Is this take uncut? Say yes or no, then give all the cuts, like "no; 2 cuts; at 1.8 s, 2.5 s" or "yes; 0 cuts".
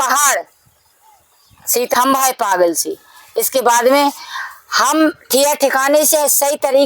no; 1 cut; at 1.9 s